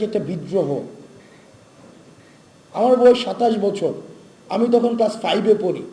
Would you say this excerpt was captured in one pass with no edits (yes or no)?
yes